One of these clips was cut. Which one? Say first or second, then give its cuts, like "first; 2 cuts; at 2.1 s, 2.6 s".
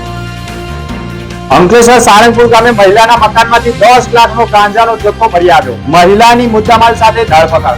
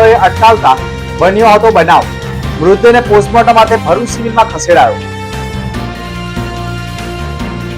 first; 1 cut; at 1.4 s